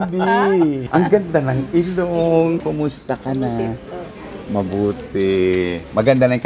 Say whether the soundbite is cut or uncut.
uncut